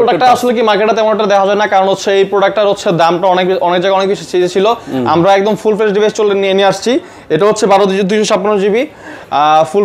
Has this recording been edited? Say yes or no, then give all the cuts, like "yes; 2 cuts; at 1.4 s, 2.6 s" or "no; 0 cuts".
no; 0 cuts